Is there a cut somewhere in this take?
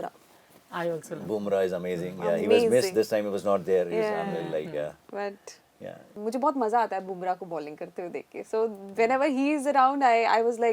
yes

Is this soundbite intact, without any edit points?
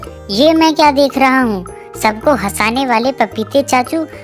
yes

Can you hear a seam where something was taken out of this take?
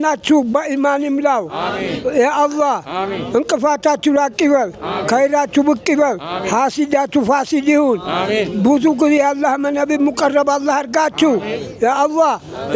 no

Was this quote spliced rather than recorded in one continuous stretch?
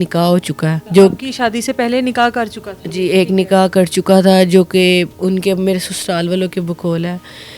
no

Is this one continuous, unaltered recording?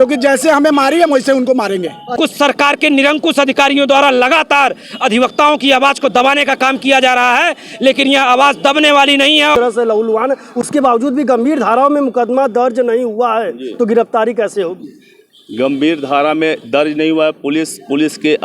no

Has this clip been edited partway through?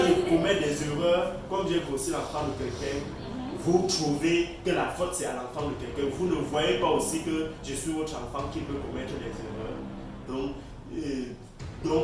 no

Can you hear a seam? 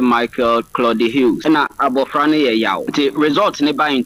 yes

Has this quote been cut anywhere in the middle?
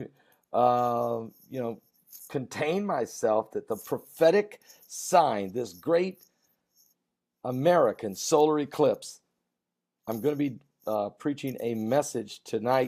yes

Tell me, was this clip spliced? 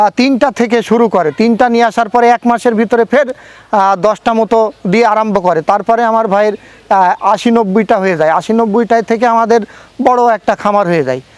no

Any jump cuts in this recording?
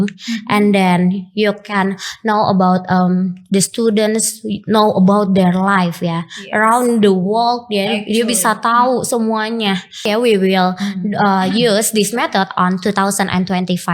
yes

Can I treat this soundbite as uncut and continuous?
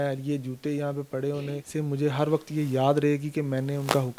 no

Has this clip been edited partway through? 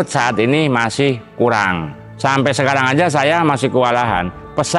yes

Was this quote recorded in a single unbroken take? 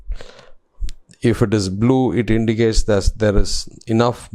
yes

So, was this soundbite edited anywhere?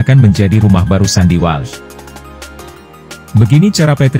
yes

